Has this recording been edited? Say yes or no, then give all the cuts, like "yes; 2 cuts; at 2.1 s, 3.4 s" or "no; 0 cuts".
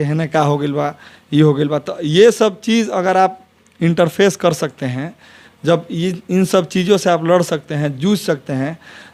no; 0 cuts